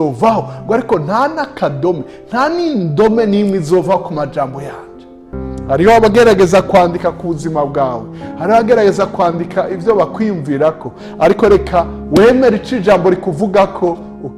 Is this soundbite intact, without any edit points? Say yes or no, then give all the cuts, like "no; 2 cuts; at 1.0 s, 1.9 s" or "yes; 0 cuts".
no; 1 cut; at 5.3 s